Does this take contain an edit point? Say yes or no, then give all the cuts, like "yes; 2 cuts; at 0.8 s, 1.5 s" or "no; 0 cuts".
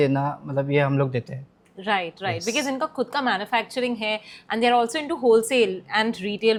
no; 0 cuts